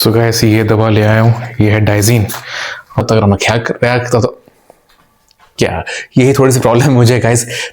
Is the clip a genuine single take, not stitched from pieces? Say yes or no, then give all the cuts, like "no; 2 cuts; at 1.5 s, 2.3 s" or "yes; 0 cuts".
no; 1 cut; at 3.0 s